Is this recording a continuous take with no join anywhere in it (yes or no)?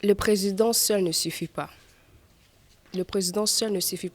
yes